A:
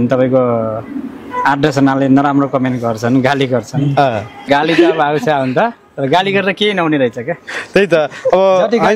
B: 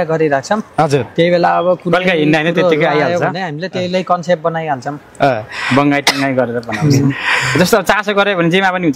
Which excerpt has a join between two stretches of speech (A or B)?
A